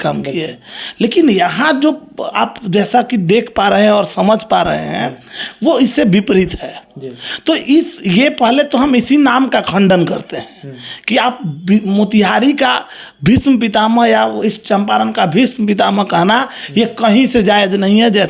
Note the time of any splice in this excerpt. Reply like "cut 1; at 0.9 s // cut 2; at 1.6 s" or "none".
none

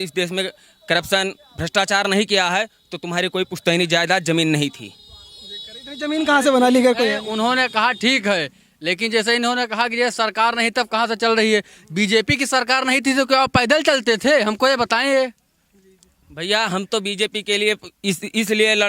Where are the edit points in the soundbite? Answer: none

